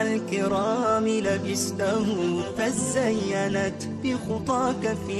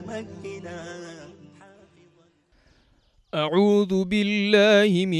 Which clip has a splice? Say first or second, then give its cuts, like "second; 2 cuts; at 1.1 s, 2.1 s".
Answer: second; 1 cut; at 2.0 s